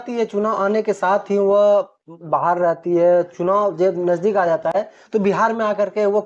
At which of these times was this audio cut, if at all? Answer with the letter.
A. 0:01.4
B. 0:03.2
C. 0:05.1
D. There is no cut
D